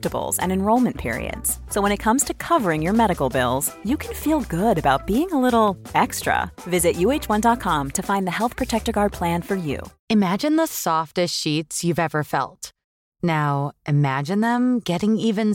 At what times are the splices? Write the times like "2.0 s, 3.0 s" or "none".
9.9 s